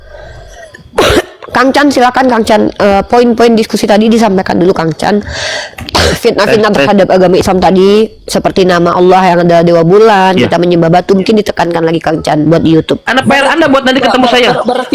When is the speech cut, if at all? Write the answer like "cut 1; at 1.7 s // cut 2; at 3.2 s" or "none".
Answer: cut 1; at 13.5 s